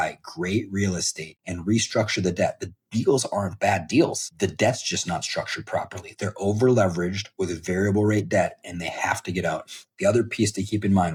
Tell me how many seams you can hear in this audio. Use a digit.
0